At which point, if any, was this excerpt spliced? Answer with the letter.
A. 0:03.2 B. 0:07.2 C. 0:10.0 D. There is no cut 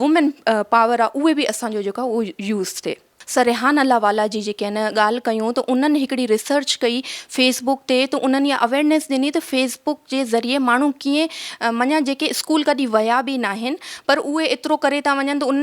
A